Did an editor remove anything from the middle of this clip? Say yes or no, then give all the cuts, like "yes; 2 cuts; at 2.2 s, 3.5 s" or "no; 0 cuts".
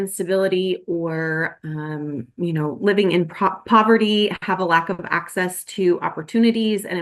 no; 0 cuts